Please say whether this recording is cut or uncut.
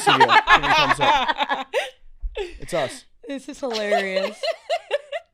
uncut